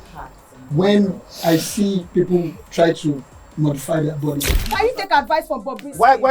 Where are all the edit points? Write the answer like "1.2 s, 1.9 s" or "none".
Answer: 4.6 s